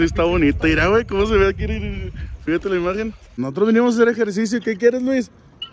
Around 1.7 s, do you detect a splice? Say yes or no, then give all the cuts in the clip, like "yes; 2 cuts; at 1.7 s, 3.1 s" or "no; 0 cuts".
no; 1 cut; at 3.3 s